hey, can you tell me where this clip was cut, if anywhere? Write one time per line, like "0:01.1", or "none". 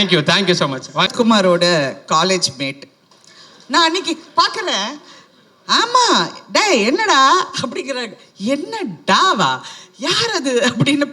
0:01.1